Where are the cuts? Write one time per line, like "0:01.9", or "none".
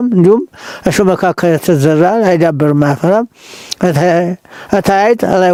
none